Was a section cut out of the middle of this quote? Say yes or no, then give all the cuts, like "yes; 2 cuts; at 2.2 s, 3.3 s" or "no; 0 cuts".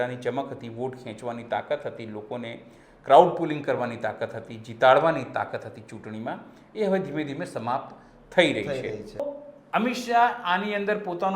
yes; 1 cut; at 9.3 s